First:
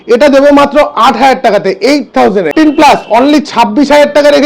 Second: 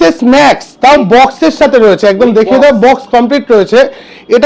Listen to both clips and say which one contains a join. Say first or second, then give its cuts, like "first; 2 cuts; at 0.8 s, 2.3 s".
first; 1 cut; at 2.5 s